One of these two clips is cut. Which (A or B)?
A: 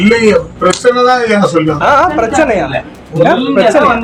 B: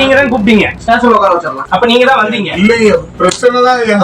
B